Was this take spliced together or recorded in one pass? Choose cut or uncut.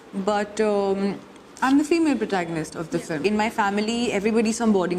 cut